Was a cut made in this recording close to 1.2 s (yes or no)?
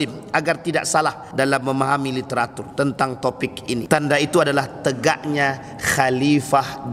yes